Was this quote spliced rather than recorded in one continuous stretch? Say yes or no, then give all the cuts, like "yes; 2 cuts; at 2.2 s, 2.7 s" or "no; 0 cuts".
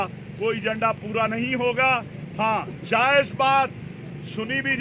no; 0 cuts